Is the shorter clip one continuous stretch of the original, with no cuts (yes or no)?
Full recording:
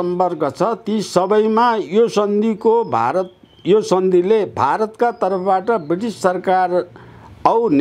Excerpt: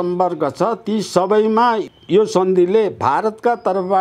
no